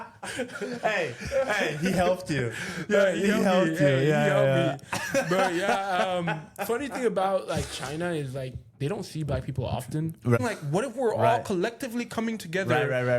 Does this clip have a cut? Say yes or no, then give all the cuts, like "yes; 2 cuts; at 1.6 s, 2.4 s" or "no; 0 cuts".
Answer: yes; 1 cut; at 10.4 s